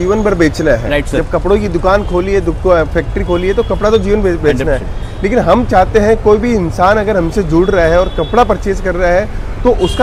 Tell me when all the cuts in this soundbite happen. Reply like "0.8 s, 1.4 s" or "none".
none